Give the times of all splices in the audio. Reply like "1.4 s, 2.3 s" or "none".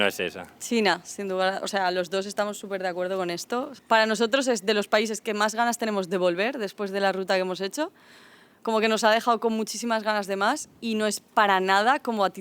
3.7 s